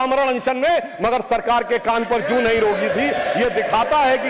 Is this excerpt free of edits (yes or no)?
yes